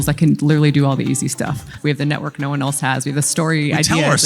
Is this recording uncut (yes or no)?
no